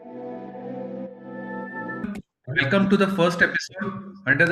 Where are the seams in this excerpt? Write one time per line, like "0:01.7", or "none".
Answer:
0:02.0

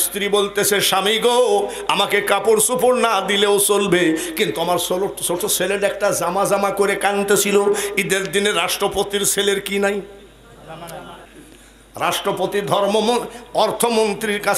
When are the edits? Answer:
0:11.2

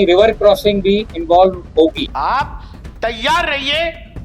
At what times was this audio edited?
0:01.1
0:02.0

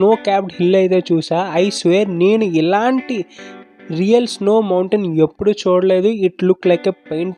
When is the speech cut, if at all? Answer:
none

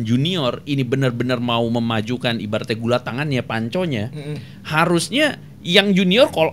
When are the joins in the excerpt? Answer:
none

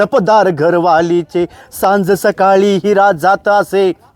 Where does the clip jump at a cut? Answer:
none

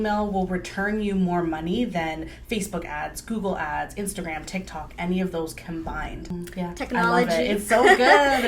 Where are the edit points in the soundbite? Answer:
0:06.3

